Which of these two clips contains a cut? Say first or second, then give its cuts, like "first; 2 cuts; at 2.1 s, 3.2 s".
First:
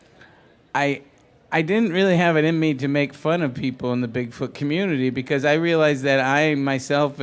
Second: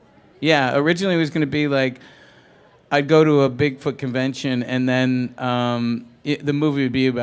second; 1 cut; at 3.2 s